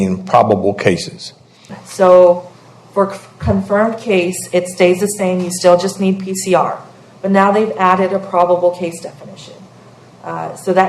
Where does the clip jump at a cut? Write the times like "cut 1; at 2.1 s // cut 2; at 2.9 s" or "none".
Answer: cut 1; at 1.6 s